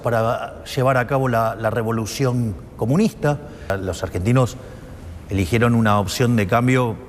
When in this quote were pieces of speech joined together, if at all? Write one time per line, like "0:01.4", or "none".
0:03.8